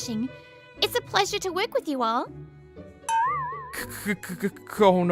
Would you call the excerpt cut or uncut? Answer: uncut